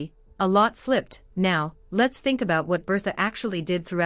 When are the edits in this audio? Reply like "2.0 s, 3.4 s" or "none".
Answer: none